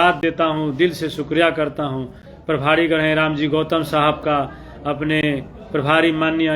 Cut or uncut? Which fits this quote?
cut